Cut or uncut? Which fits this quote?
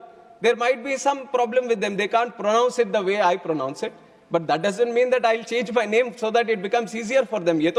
uncut